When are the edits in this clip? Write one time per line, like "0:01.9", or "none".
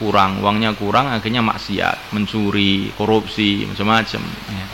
0:02.0